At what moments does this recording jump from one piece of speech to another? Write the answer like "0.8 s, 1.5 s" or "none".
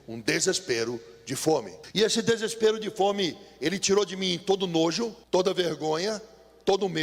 1.8 s, 5.2 s